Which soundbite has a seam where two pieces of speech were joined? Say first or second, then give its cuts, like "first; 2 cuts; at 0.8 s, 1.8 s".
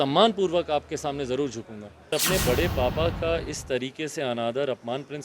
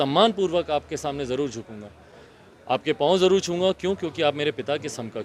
first; 1 cut; at 2.1 s